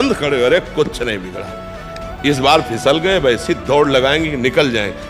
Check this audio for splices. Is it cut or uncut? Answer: uncut